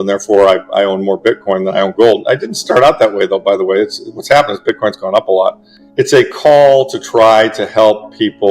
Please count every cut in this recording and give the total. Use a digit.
1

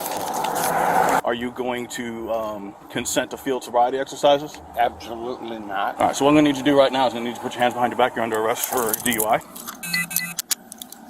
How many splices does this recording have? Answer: 3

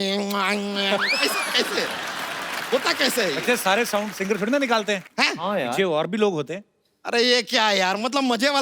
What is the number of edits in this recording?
1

